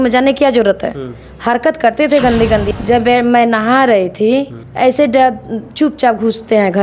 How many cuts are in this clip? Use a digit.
2